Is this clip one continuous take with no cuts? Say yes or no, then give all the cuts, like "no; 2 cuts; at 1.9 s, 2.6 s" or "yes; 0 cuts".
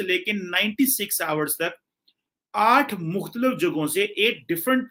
yes; 0 cuts